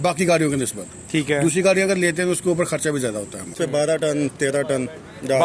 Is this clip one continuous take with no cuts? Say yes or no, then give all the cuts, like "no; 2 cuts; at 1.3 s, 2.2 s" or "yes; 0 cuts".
no; 1 cut; at 3.6 s